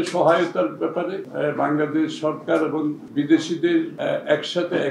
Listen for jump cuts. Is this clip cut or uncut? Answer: cut